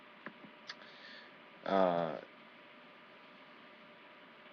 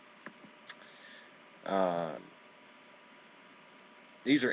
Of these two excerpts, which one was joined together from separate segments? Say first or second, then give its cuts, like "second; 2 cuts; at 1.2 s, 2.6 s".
first; 1 cut; at 2.2 s